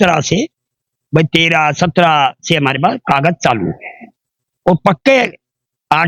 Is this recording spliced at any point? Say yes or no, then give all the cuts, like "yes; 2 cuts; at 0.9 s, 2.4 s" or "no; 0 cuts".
no; 0 cuts